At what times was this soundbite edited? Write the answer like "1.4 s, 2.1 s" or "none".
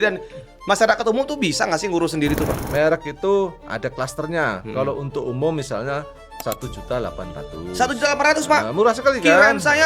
2.6 s